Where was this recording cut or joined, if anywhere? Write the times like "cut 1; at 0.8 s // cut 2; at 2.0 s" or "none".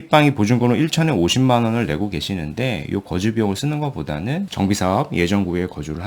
cut 1; at 4.5 s